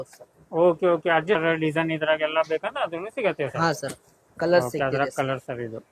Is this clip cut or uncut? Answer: cut